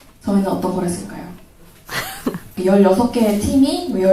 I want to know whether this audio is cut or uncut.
cut